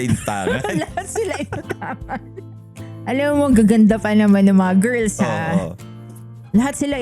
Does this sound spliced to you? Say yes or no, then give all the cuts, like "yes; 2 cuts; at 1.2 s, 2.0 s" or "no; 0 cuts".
no; 0 cuts